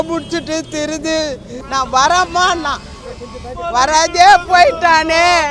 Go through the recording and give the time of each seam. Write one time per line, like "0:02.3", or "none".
0:01.5